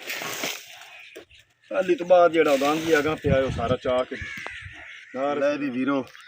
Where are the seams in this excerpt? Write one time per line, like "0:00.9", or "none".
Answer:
0:05.4